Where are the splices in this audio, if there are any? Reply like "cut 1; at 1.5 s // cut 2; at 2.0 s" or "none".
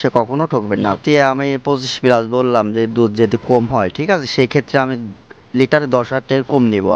cut 1; at 1.0 s